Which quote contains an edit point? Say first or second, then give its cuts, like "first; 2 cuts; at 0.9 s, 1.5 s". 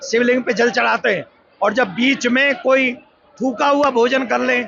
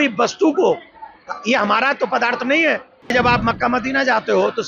second; 1 cut; at 3.1 s